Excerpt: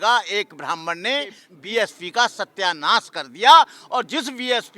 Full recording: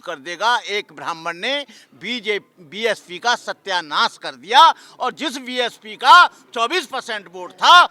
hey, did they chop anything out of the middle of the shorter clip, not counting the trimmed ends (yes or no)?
yes